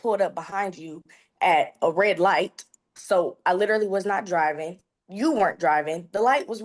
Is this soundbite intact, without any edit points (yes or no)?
yes